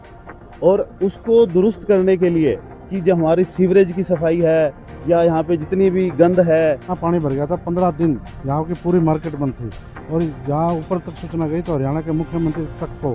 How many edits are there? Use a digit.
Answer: 1